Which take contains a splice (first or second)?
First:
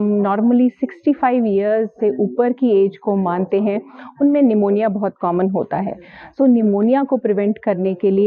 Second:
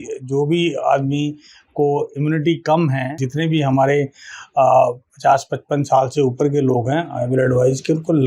second